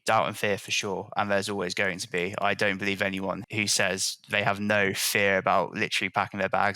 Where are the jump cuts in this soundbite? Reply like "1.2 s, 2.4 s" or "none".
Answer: 3.4 s